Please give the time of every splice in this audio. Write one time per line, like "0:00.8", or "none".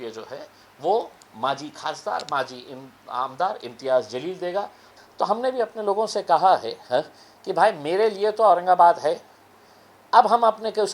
0:04.8